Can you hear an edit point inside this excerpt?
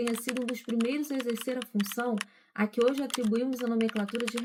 no; 0 cuts

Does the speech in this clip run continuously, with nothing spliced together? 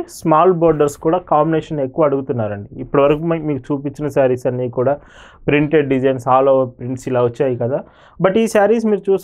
yes; 0 cuts

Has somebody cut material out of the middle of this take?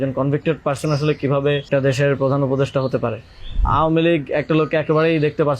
yes; 2 cuts; at 1.7 s, 3.6 s

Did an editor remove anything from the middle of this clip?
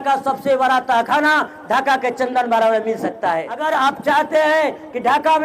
yes; 1 cut; at 3.5 s

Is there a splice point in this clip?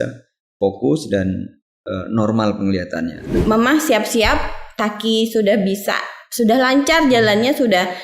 yes; 1 cut; at 3.3 s

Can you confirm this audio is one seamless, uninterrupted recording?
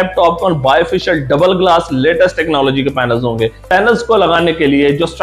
no; 1 cut; at 3.6 s

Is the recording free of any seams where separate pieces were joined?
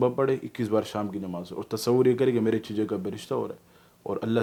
yes; 0 cuts

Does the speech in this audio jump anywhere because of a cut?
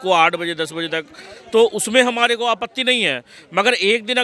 no; 0 cuts

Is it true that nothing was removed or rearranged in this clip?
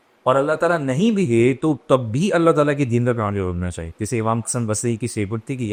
yes; 0 cuts

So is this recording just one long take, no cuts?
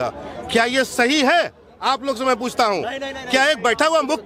yes; 0 cuts

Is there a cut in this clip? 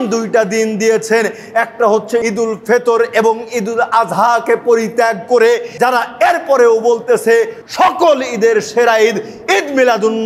yes; 3 cuts; at 2.2 s, 5.7 s, 7.6 s

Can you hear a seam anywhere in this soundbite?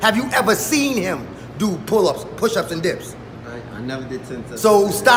no; 0 cuts

